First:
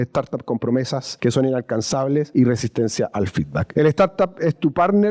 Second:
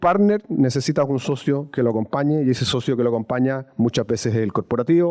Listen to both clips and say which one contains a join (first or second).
first